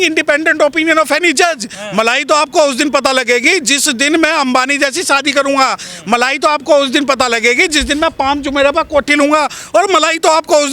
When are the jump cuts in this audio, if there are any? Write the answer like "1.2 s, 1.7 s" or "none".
1.8 s